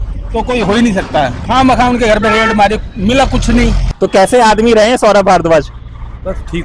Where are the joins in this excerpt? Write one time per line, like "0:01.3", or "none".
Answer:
0:01.4
0:03.8